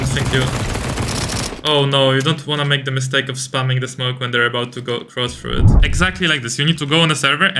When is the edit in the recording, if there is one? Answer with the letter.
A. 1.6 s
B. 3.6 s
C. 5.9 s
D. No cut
C